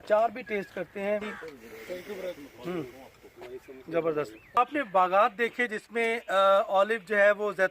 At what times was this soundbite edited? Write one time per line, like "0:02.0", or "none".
0:01.4
0:04.6